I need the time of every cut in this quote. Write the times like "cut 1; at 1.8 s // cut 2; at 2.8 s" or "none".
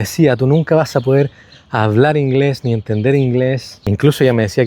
none